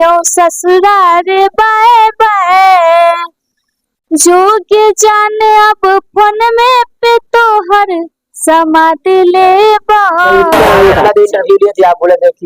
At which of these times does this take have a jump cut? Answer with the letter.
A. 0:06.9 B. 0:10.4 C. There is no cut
B